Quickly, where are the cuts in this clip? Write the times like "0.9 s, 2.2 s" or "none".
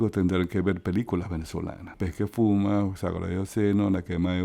1.9 s